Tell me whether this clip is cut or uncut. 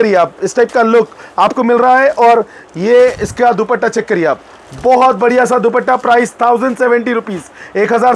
uncut